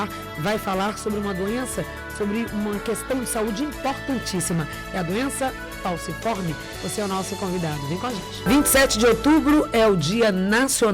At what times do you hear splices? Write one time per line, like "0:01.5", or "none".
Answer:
0:08.4